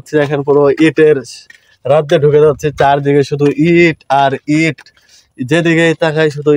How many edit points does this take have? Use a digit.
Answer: 0